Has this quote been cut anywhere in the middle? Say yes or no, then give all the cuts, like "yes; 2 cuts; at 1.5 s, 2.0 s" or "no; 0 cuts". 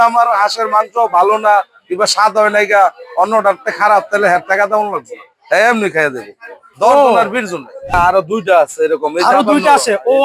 yes; 1 cut; at 7.9 s